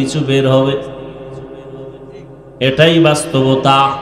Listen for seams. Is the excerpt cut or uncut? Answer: uncut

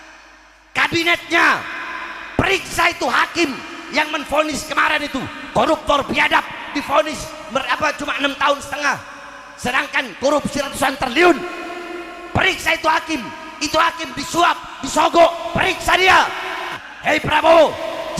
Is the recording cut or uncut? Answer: cut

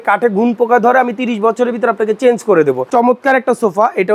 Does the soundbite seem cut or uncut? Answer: cut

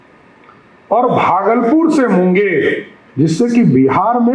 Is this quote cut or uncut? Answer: cut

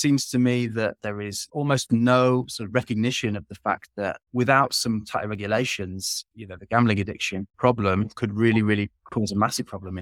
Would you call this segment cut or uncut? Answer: cut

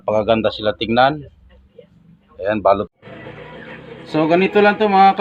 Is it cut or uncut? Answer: cut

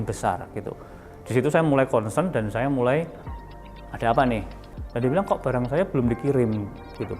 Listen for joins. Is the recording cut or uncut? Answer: cut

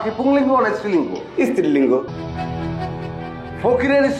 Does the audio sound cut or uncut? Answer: cut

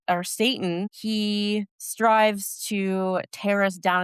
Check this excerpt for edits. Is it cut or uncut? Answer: cut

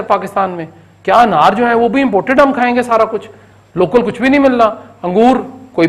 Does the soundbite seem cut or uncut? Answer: uncut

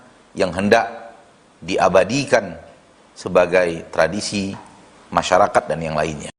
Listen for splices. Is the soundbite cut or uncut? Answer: uncut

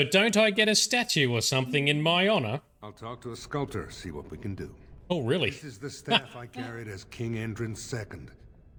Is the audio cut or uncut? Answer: uncut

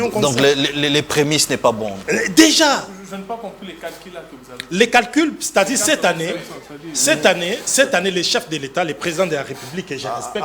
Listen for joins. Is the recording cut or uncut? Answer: uncut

